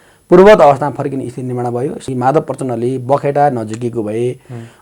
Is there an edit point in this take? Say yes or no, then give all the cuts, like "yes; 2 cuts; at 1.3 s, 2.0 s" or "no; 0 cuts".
yes; 1 cut; at 2.0 s